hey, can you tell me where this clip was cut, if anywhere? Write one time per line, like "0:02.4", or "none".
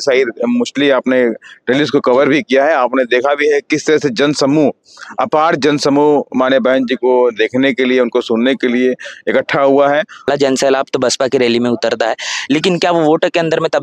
0:10.3

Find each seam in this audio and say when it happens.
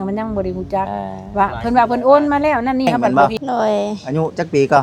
0:03.0

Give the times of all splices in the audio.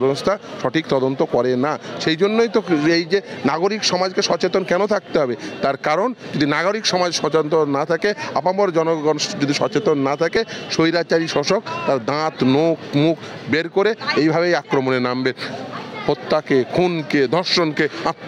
none

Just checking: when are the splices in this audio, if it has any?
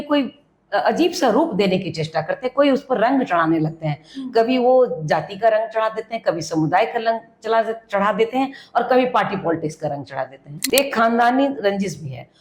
0:10.6

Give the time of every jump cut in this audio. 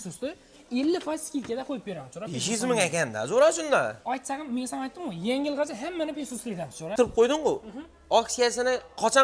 0:06.9

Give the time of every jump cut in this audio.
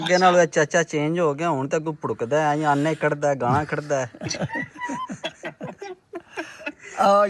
none

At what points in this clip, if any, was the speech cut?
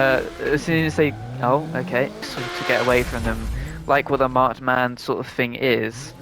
0:02.3

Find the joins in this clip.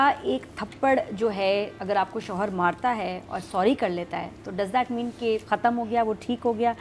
0:01.8
0:05.4

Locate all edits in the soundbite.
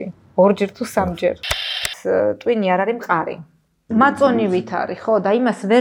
0:01.5
0:03.7

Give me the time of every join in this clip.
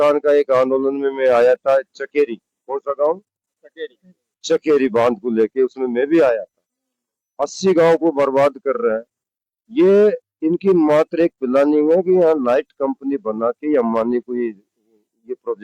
none

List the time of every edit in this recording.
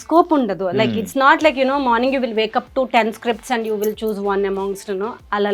none

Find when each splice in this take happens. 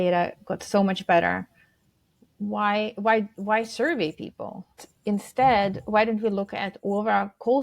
0:04.8

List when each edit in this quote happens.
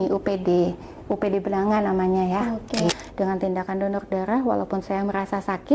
0:02.9

